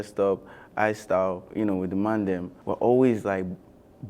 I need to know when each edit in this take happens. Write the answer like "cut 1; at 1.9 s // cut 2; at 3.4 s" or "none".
cut 1; at 1.4 s // cut 2; at 2.6 s